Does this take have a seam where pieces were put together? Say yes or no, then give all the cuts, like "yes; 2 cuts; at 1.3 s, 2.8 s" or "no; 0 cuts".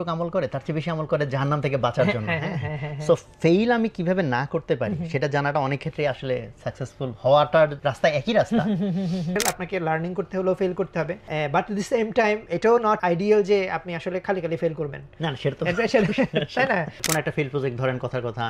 yes; 5 cuts; at 7.8 s, 9.4 s, 11.2 s, 13.0 s, 17.0 s